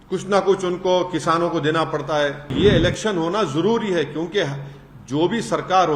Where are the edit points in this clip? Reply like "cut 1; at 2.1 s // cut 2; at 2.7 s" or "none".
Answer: cut 1; at 2.5 s